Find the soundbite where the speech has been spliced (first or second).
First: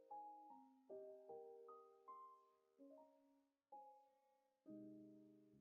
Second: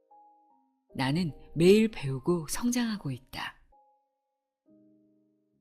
second